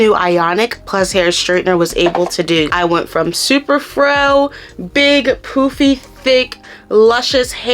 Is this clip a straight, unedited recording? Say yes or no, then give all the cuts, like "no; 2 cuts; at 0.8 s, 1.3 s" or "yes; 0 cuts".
no; 1 cut; at 2.7 s